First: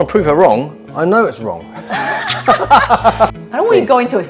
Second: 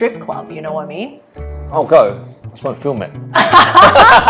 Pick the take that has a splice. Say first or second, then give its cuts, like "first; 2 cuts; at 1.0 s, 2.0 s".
first; 1 cut; at 3.3 s